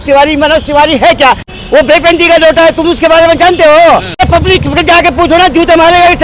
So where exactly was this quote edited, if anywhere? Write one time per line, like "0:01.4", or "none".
0:01.5
0:04.2

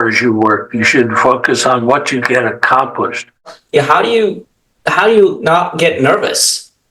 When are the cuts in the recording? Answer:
0:03.6

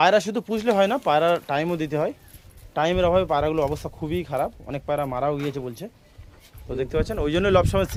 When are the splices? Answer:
none

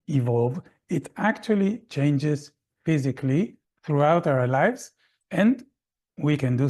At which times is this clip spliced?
0:03.7

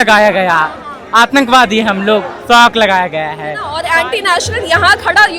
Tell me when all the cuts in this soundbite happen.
0:03.7

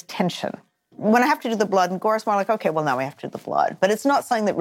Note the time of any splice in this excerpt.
0:00.9

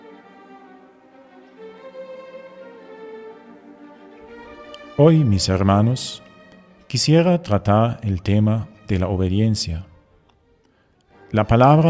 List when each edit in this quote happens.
none

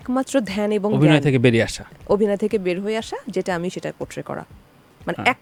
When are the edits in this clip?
none

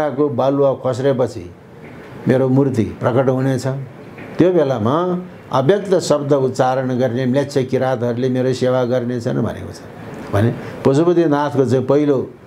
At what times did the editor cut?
none

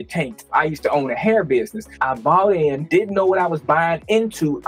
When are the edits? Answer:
none

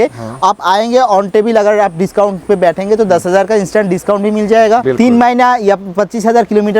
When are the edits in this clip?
0:04.8

